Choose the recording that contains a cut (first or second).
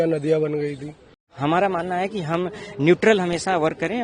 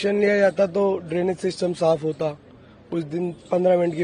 first